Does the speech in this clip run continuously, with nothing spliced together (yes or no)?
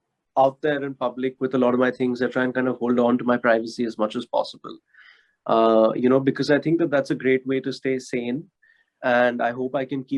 yes